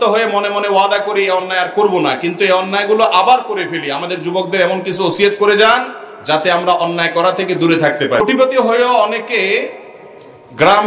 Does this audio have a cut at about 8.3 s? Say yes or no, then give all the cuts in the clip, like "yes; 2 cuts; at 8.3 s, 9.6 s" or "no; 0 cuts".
yes; 1 cut; at 8.3 s